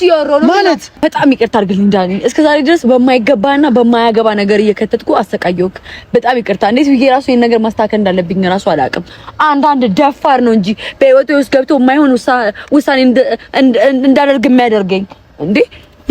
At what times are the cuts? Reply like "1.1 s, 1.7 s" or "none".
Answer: 0.9 s